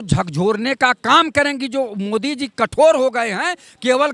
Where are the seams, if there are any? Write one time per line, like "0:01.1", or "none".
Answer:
none